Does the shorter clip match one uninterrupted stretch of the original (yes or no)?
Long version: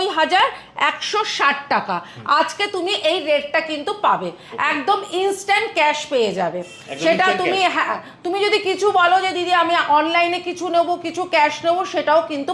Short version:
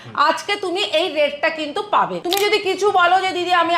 no